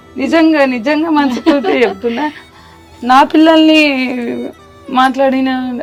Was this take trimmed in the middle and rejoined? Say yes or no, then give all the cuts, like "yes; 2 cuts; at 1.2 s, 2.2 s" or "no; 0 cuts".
no; 0 cuts